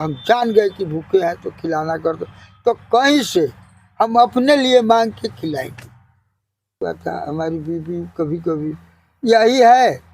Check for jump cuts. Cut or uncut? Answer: cut